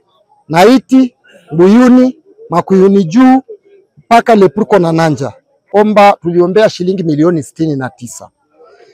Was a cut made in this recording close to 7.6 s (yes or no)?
no